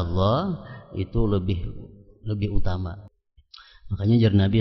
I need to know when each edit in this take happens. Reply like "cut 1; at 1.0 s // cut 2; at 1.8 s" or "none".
cut 1; at 3.0 s